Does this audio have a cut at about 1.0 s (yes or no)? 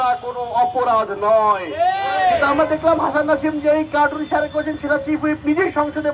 no